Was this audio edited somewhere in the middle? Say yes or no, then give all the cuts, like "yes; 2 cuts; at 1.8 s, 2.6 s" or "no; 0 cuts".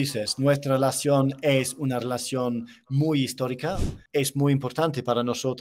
yes; 1 cut; at 3.9 s